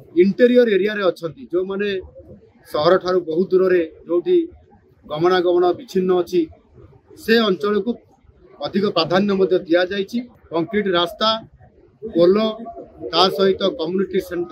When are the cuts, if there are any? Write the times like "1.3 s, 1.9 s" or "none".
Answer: 10.3 s